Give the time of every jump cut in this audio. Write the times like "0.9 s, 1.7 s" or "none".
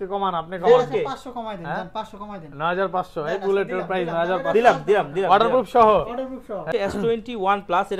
6.7 s